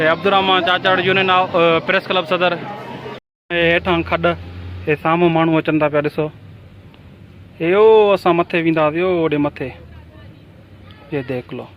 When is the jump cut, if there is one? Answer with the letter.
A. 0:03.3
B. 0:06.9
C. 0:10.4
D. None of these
A